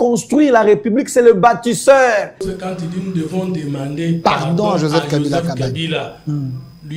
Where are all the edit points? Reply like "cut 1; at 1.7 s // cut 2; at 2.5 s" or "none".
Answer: cut 1; at 2.4 s